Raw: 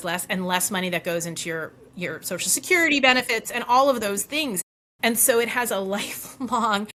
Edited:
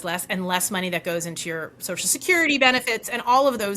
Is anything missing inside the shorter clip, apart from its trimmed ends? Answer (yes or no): yes